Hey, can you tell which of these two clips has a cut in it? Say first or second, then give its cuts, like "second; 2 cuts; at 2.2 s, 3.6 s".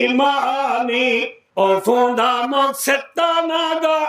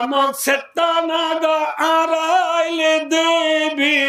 first; 1 cut; at 1.4 s